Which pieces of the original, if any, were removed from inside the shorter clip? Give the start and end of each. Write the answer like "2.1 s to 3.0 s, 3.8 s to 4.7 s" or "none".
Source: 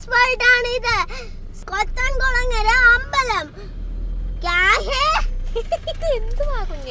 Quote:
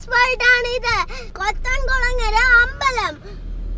0.9 s to 1.2 s